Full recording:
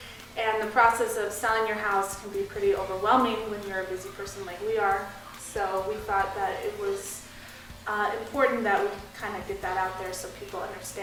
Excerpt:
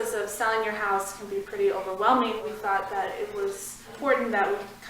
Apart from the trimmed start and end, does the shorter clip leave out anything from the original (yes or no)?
yes